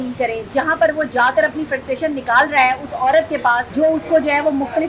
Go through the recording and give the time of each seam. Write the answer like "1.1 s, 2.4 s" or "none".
3.7 s